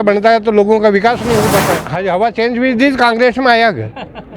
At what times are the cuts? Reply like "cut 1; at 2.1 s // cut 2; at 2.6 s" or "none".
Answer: cut 1; at 1.9 s